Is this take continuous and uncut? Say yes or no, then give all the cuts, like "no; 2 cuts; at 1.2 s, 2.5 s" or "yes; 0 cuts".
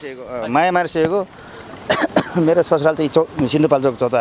yes; 0 cuts